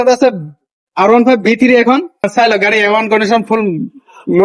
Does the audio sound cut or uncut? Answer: cut